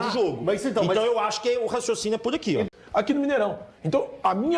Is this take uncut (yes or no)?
no